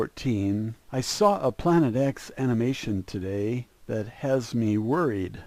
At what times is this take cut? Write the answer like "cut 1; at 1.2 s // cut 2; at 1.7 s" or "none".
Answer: none